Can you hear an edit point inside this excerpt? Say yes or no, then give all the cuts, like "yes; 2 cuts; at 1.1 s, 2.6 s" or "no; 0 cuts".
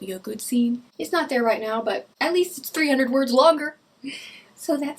yes; 2 cuts; at 0.9 s, 2.1 s